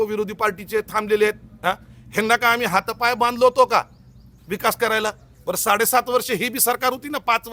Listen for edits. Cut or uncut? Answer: uncut